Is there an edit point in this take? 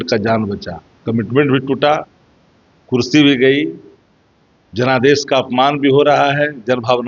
no; 0 cuts

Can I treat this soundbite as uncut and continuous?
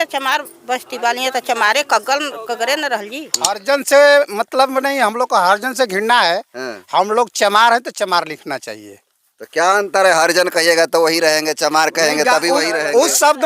no; 1 cut; at 3.6 s

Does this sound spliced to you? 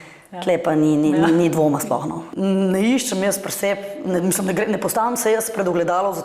yes; 1 cut; at 2.2 s

